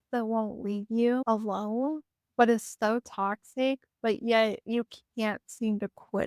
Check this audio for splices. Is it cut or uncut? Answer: cut